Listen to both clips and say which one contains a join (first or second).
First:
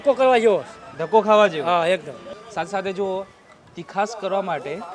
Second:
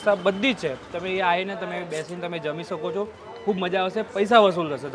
first